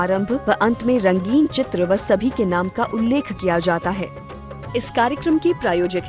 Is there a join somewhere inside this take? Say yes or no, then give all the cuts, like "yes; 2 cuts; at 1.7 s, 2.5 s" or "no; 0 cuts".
yes; 1 cut; at 4.1 s